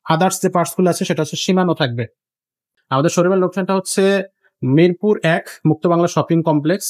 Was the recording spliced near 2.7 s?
yes; 1 cut; at 2.7 s

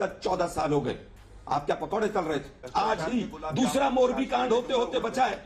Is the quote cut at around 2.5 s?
yes; 1 cut; at 2.5 s

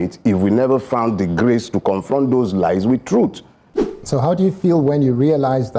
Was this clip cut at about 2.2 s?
no; 1 cut; at 3.6 s

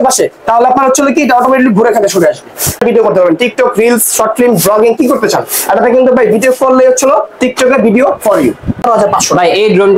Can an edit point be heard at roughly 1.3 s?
no; 2 cuts; at 2.8 s, 8.8 s

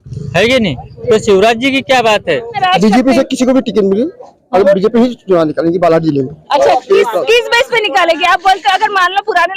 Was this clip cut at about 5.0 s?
no; 1 cut; at 2.6 s

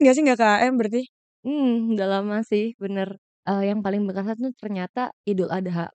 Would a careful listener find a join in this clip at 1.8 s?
no; 1 cut; at 3.3 s

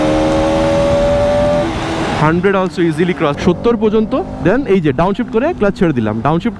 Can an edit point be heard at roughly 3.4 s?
yes; 1 cut; at 3.4 s

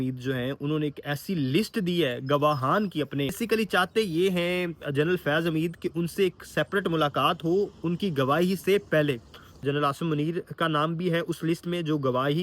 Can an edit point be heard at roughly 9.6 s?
yes; 2 cuts; at 3.4 s, 9.6 s

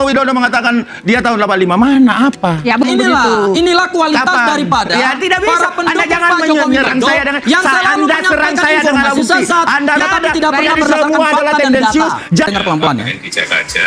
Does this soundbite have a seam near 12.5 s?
yes; 3 cuts; at 2.8 s, 10.0 s, 12.5 s

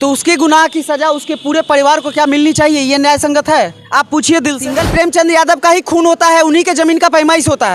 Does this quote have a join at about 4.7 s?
yes; 1 cut; at 4.7 s

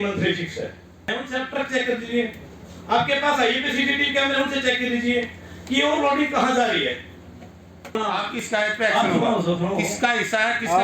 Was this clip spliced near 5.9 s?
no; 2 cuts; at 1.2 s, 7.9 s

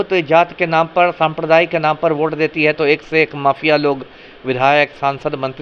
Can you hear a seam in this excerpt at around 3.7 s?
no; 0 cuts

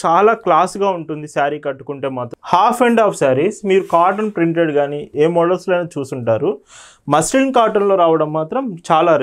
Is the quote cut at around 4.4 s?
no; 1 cut; at 2.3 s

